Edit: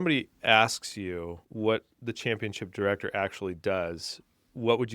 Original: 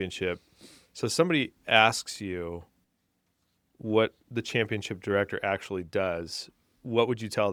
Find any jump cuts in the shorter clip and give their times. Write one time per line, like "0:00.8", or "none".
0:01.4